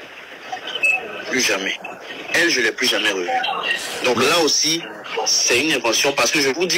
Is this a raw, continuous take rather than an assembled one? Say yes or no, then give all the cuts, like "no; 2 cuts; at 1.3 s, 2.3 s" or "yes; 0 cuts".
yes; 0 cuts